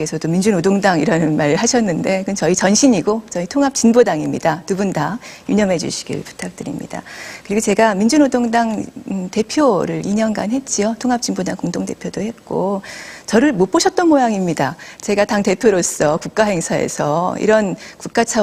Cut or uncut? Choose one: cut